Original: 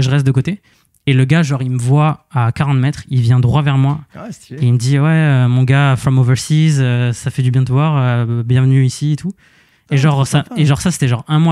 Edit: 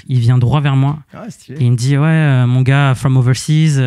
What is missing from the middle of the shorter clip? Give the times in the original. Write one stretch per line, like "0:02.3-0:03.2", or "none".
none